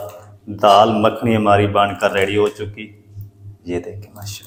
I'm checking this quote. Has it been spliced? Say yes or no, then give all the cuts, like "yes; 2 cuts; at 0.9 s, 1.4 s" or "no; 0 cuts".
no; 0 cuts